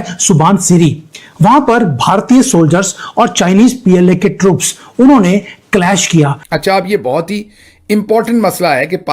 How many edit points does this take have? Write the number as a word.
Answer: one